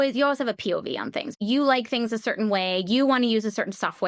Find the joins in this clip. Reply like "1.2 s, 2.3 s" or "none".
1.3 s

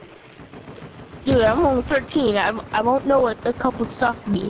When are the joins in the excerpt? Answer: none

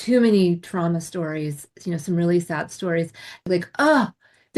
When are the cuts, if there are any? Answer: 3.4 s

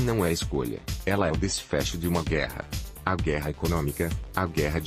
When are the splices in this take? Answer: none

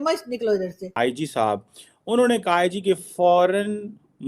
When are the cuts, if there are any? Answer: 0.9 s

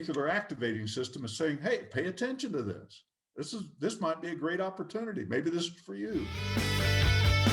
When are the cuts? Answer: 6.4 s

